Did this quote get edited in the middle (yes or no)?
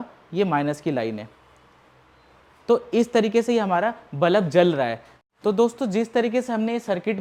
no